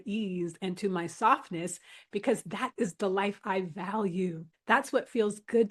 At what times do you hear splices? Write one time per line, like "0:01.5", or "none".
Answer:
none